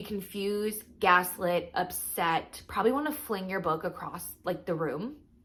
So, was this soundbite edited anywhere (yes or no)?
no